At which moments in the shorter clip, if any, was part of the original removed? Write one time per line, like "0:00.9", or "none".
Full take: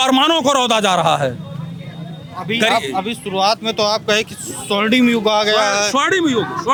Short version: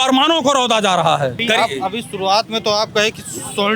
0:01.4